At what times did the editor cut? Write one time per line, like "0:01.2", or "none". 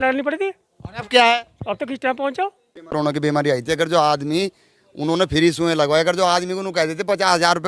0:02.9